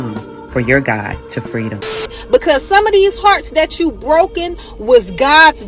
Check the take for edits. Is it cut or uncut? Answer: cut